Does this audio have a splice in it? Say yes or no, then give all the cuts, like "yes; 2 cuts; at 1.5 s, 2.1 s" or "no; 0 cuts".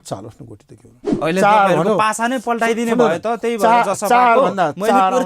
yes; 1 cut; at 1.0 s